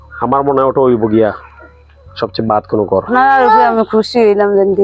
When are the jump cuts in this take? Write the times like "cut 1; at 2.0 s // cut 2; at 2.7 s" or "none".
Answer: cut 1; at 3.1 s